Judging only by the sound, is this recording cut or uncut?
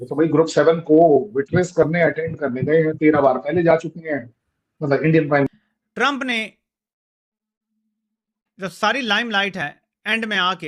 cut